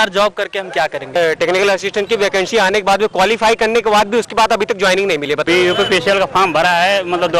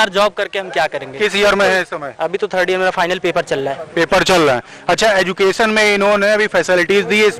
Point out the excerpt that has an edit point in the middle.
first; 2 cuts; at 1.2 s, 5.5 s

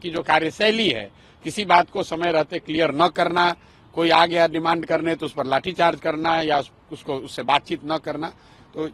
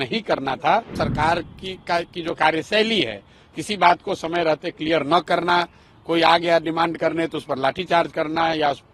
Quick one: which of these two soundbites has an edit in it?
second; 1 cut; at 0.9 s

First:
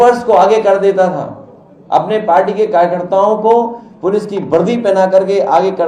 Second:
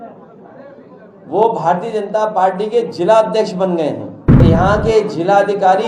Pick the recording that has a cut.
second; 1 cut; at 4.4 s

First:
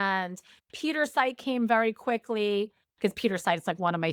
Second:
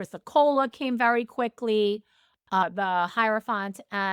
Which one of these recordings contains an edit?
second; 1 cut; at 2.6 s

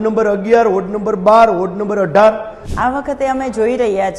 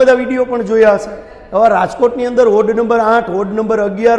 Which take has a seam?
first; 1 cut; at 2.6 s

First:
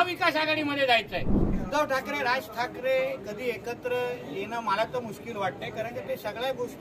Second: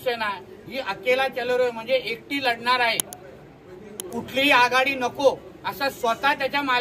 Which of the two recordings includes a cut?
first; 1 cut; at 1.4 s

